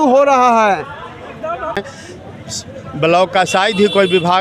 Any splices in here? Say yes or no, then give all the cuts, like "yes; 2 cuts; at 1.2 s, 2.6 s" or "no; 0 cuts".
yes; 1 cut; at 1.8 s